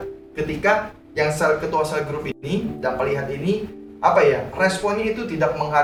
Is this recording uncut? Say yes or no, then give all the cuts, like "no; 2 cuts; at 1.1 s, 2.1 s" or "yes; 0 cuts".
yes; 0 cuts